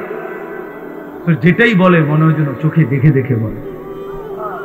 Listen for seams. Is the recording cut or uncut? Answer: cut